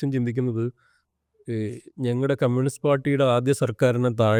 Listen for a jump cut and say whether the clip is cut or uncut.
uncut